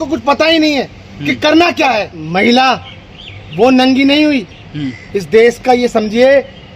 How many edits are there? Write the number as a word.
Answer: one